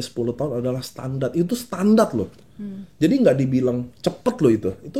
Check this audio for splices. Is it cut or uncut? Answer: uncut